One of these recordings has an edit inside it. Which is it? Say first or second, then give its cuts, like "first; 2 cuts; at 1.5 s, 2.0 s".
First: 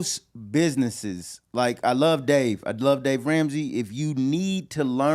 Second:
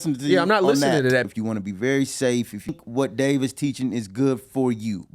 second; 2 cuts; at 1.2 s, 2.7 s